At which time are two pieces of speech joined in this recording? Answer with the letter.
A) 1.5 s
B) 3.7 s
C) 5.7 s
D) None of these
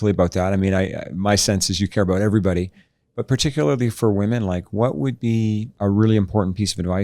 C